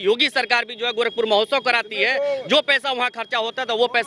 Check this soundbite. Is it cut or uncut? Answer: uncut